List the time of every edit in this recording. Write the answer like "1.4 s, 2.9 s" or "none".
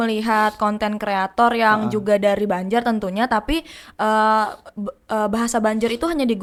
none